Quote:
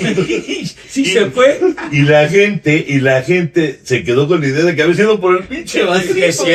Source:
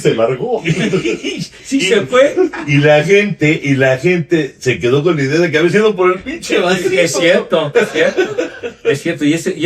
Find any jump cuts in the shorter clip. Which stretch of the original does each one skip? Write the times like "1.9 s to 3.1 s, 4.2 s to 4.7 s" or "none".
none